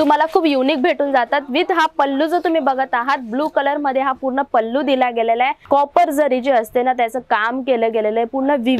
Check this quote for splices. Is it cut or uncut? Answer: cut